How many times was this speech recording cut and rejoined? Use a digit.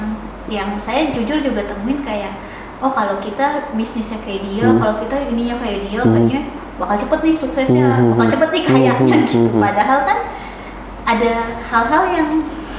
0